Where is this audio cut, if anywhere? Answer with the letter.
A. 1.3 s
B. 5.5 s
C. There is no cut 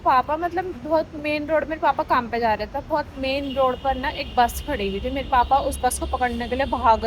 C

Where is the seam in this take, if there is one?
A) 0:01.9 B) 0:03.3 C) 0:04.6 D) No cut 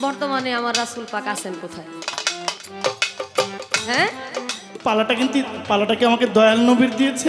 C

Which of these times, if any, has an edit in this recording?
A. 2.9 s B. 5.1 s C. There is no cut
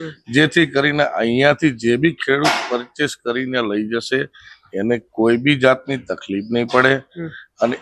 C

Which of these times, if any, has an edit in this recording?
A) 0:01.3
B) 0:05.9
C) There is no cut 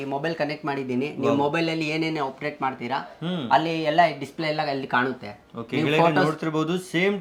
C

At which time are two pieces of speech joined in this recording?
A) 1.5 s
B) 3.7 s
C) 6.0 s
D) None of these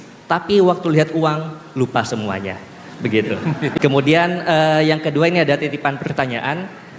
B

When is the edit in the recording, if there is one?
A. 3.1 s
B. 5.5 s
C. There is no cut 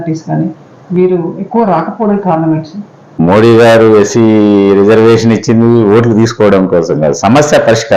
A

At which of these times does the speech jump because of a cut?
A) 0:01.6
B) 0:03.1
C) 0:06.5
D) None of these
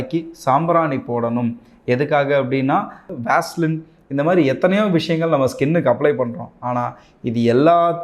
B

